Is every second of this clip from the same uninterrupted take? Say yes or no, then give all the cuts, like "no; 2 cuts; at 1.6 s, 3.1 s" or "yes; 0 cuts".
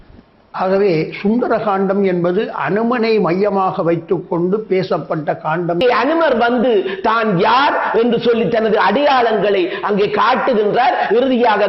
no; 1 cut; at 5.8 s